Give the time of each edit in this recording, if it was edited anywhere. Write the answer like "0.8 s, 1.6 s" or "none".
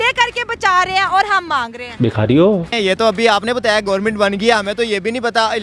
2.7 s